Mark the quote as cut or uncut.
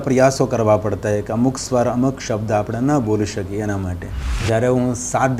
cut